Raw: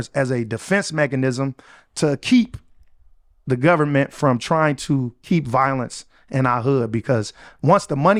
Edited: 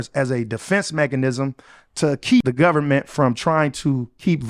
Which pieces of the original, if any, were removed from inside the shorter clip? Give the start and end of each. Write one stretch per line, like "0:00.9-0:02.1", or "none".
0:02.4-0:03.5